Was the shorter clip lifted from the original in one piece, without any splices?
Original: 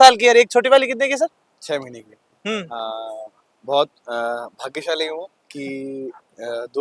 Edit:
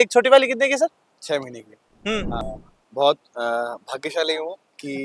no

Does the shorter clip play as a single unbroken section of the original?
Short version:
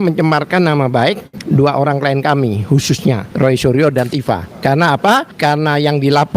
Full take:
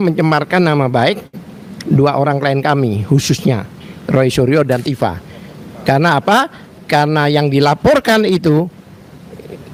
no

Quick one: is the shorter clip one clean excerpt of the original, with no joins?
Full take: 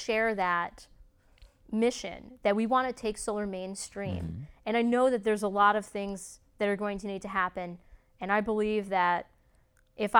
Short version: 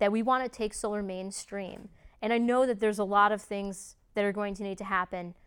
yes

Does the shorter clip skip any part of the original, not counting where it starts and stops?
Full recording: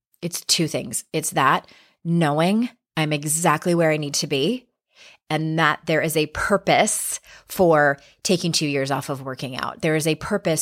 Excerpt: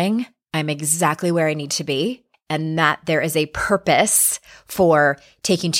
yes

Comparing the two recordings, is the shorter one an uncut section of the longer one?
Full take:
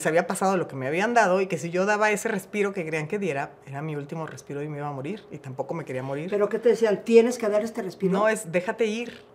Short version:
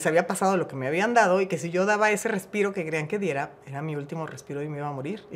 yes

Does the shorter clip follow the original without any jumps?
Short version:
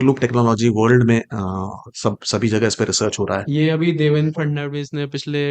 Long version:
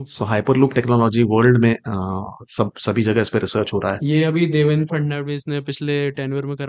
yes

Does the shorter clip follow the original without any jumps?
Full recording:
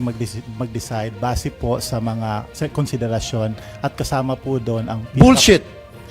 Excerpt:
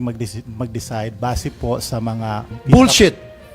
no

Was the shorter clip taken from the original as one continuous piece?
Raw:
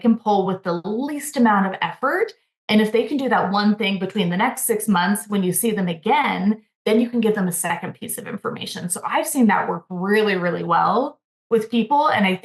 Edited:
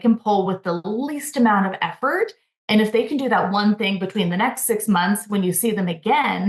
yes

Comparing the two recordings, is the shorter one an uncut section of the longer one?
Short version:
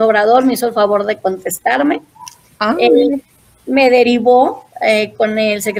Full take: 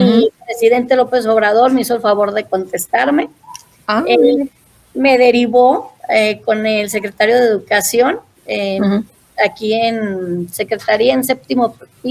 yes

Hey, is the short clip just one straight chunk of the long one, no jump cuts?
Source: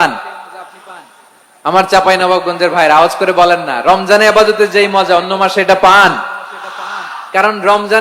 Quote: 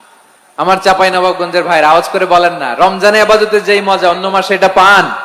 yes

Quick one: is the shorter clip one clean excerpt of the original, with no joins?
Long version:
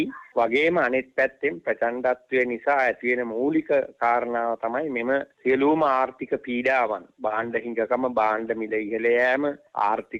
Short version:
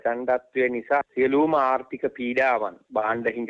no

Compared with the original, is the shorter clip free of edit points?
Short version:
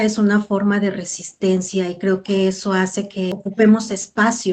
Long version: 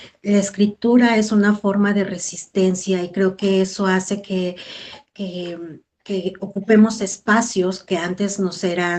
no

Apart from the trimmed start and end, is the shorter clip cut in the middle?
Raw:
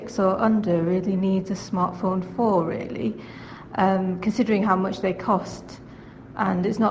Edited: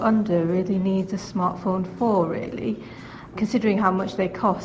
yes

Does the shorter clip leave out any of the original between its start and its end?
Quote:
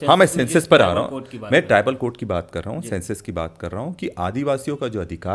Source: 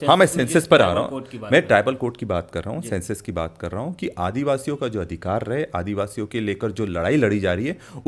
no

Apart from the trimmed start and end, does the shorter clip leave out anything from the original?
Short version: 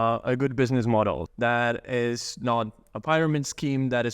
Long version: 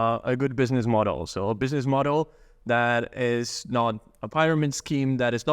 yes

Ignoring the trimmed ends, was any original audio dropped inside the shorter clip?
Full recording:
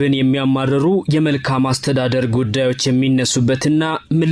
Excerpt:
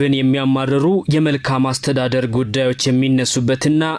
no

